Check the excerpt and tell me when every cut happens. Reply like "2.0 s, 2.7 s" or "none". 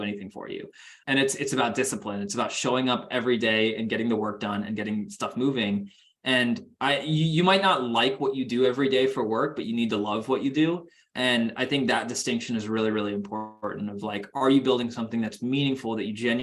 1.0 s, 11.0 s